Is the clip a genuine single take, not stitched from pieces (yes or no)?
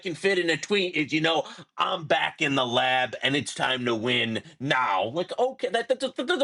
yes